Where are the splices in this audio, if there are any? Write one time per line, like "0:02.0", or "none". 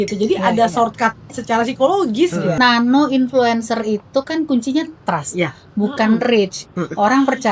0:02.6

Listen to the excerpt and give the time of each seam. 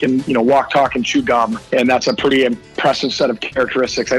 0:01.6

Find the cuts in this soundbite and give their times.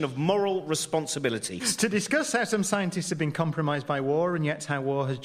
0:03.8

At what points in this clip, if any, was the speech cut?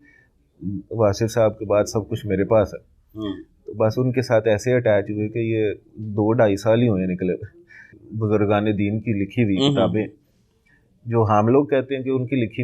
0:07.9

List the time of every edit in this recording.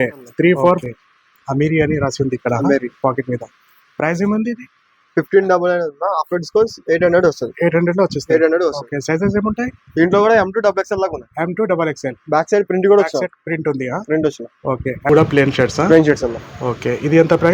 0:00.8
0:15.1

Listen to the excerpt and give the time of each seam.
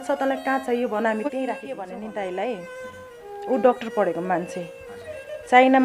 0:01.8

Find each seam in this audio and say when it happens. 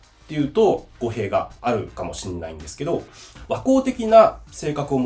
0:01.5

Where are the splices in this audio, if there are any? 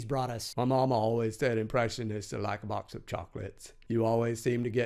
0:02.9

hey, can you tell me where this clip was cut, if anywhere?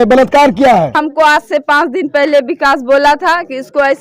0:00.9

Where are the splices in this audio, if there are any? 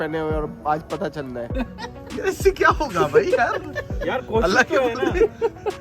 0:01.3

